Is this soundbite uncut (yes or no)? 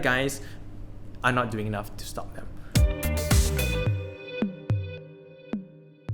no